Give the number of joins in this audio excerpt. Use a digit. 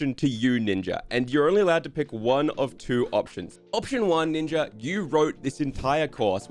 1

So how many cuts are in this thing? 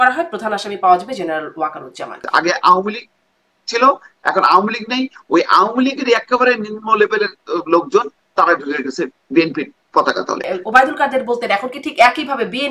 2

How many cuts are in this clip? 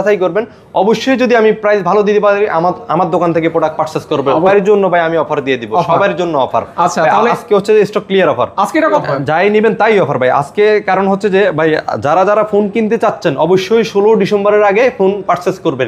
2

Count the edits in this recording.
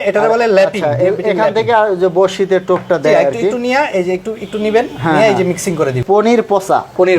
1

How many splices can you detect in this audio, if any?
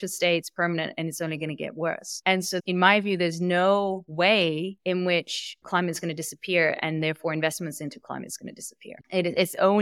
1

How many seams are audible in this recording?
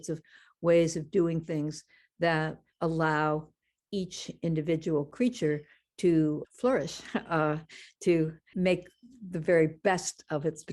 3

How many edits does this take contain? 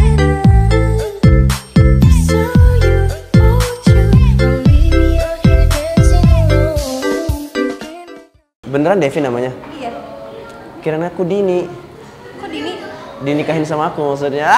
1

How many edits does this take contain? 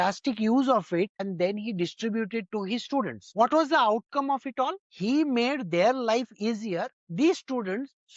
2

